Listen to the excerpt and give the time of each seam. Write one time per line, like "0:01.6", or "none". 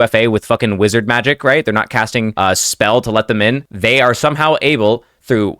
0:02.3
0:03.7